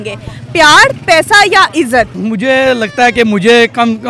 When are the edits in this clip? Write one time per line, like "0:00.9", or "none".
0:02.1